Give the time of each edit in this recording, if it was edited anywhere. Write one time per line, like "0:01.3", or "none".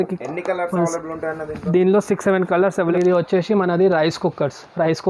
0:02.9